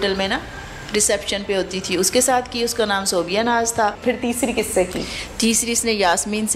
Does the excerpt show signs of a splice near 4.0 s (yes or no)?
yes